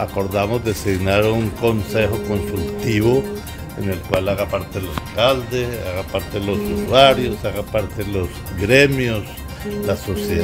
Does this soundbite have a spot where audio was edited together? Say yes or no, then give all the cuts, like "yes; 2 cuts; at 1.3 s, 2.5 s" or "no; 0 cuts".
no; 0 cuts